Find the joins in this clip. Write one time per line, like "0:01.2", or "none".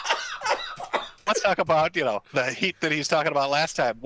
0:01.2

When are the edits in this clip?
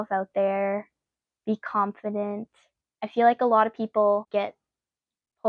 0:04.3

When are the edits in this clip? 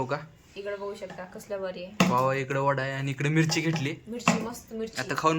none

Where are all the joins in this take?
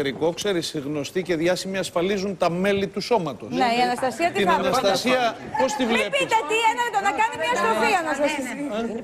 0:05.2

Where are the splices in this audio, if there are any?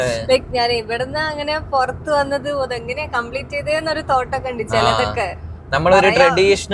none

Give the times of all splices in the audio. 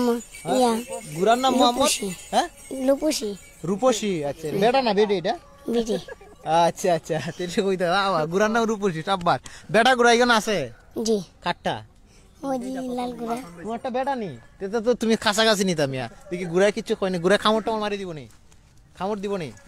none

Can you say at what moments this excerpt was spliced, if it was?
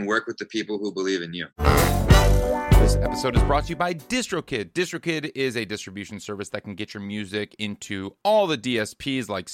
0:01.4

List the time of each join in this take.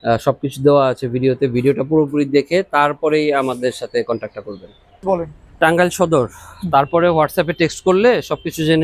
0:05.0

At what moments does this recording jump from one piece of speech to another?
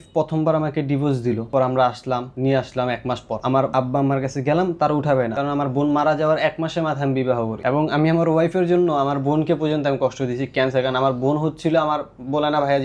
0:01.5
0:02.3
0:03.6
0:05.4
0:07.6

